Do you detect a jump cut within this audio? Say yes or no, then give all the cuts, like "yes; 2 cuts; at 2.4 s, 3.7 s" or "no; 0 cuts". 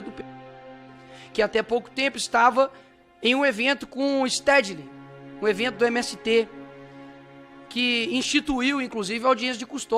no; 0 cuts